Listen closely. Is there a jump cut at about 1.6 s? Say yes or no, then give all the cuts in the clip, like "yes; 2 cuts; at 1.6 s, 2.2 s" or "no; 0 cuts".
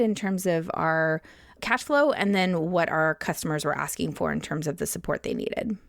yes; 1 cut; at 1.6 s